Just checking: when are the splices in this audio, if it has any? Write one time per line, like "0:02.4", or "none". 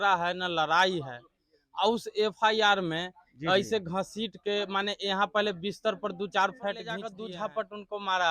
0:07.1

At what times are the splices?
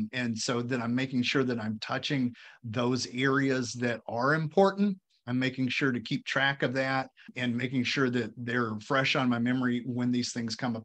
0:05.1
0:07.3

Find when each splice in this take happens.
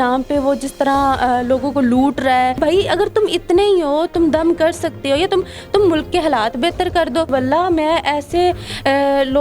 0:02.6
0:07.3

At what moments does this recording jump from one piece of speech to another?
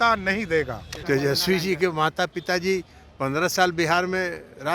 0:00.9

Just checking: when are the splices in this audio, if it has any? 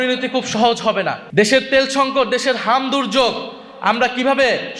0:01.2

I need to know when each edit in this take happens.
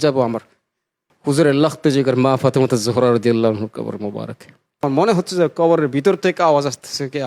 0:04.8

